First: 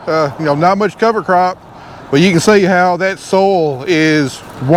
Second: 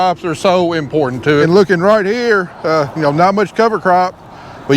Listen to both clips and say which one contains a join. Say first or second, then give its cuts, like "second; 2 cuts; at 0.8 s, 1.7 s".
second; 1 cut; at 1.4 s